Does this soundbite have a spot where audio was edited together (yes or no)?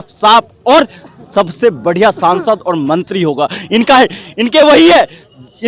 no